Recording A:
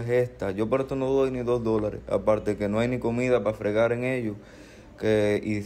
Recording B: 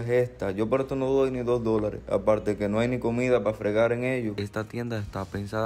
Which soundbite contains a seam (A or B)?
B